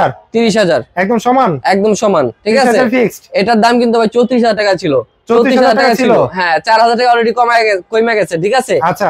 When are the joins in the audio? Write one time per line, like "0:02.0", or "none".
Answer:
none